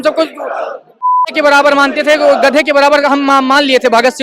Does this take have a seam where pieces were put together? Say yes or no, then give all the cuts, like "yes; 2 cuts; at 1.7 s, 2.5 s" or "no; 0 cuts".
no; 0 cuts